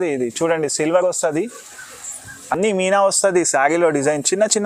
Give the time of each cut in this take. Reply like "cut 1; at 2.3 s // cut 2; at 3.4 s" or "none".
none